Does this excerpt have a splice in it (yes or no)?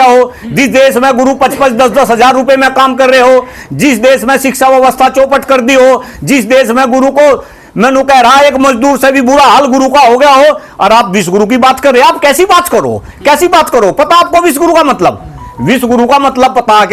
no